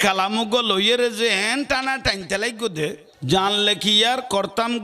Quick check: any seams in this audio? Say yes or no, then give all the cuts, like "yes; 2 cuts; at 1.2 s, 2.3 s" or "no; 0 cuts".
yes; 1 cut; at 3.1 s